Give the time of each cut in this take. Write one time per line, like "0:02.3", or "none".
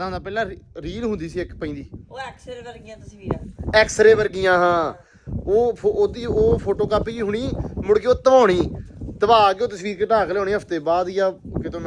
none